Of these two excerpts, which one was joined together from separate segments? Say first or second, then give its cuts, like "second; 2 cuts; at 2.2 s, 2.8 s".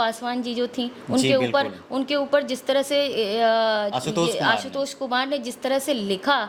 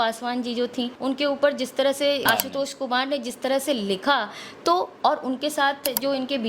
second; 2 cuts; at 0.9 s, 2.2 s